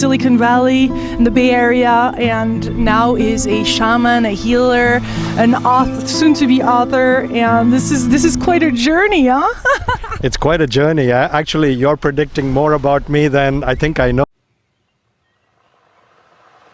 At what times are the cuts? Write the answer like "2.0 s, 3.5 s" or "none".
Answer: none